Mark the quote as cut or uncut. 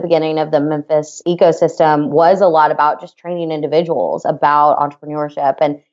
cut